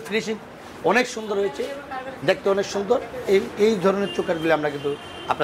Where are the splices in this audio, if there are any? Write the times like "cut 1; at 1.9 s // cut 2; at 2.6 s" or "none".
none